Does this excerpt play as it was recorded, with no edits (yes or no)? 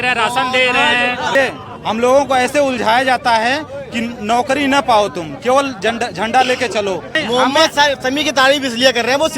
no